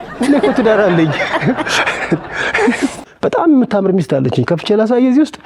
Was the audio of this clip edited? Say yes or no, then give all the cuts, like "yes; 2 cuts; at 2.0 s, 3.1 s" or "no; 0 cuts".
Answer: yes; 1 cut; at 3.0 s